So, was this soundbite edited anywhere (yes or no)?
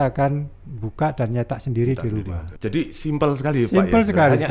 yes